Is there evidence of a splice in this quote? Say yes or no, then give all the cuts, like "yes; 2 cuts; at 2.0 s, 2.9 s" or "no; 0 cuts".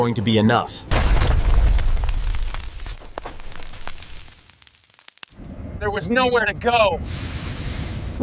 yes; 1 cut; at 0.9 s